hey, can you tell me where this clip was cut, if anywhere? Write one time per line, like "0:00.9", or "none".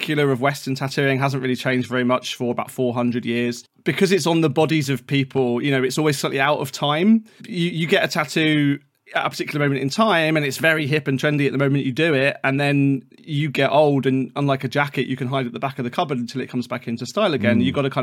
0:03.7